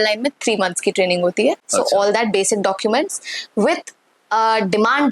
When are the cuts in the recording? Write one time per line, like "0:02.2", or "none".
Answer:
0:01.6

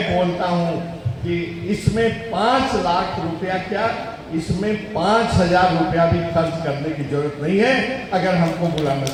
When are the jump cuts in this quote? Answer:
none

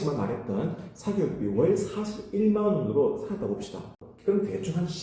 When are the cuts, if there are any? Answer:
0:04.0

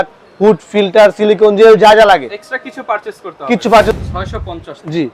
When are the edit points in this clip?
0:04.0

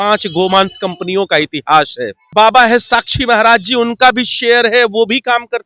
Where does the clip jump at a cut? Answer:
0:02.3

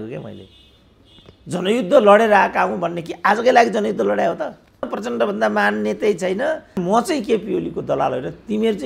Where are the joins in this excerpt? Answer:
0:04.9
0:06.8

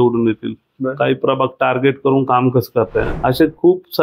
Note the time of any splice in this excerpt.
0:03.1

